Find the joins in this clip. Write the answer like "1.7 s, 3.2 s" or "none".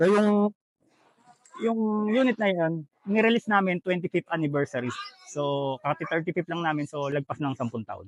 none